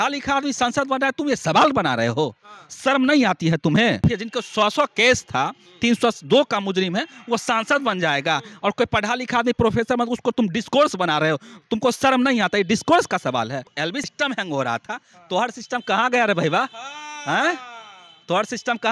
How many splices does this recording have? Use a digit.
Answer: 2